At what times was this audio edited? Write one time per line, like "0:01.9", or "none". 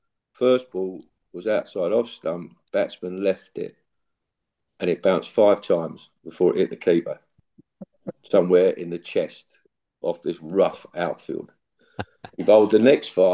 none